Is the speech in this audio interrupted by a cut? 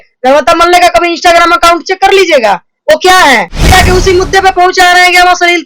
yes; 1 cut; at 3.7 s

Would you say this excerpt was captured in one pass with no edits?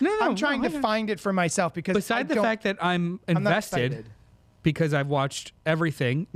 yes; 0 cuts

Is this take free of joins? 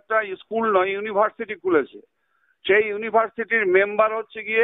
yes; 0 cuts

